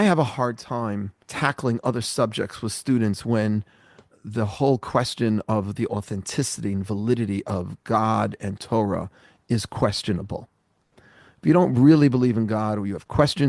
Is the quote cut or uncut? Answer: cut